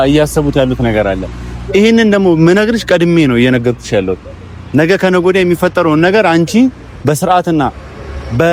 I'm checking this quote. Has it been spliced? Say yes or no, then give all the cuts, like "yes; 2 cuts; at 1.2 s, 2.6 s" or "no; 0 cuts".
no; 0 cuts